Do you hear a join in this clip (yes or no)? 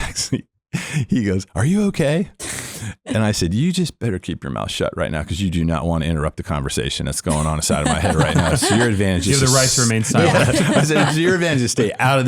no